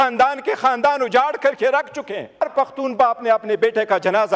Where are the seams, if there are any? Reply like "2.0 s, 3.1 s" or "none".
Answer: 2.4 s

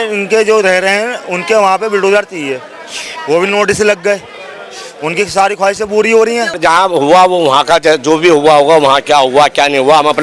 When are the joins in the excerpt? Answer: 6.6 s

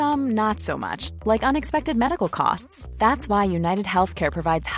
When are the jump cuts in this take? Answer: none

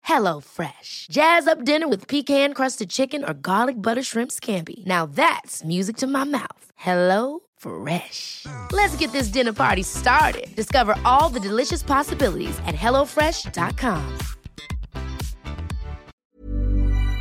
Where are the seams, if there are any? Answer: 16.2 s

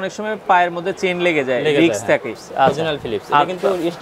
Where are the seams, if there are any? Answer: 2.4 s

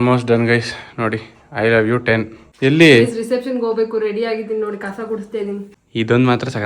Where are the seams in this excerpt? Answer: 2.4 s, 5.7 s

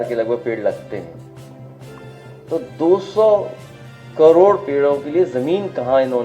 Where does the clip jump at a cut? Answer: 1.1 s, 2.5 s

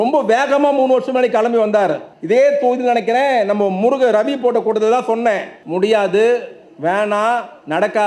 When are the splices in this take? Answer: 2.1 s, 5.5 s

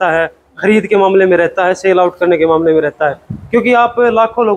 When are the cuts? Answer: none

